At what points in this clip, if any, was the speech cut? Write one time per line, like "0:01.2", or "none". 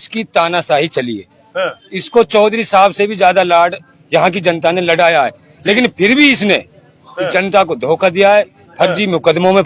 none